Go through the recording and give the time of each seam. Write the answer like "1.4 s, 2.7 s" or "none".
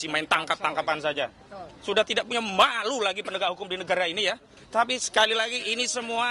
4.5 s

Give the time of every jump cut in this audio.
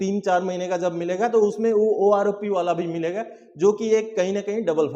none

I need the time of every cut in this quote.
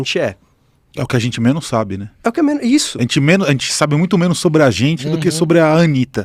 none

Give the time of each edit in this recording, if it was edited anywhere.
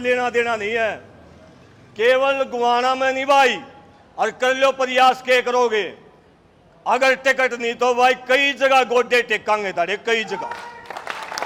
none

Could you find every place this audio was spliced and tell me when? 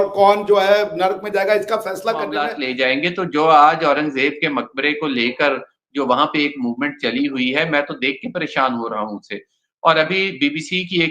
2.6 s

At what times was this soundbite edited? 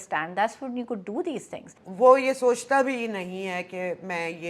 1.8 s

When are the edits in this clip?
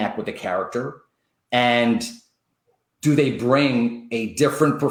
none

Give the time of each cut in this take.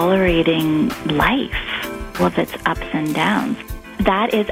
1.0 s, 2.1 s, 3.6 s

